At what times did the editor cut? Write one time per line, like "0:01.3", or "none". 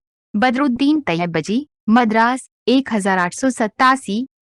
none